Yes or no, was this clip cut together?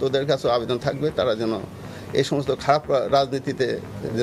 no